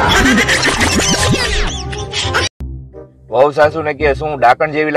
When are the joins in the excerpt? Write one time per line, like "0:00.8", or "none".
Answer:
0:02.5